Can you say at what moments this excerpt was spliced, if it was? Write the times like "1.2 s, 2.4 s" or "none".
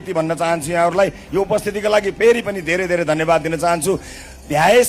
none